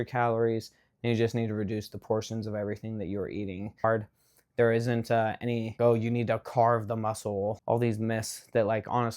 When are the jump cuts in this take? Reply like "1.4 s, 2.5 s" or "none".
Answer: 3.8 s, 5.8 s, 7.6 s